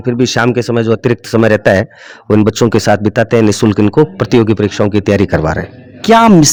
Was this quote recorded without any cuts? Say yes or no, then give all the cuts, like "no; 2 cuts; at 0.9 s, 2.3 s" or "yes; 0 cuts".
yes; 0 cuts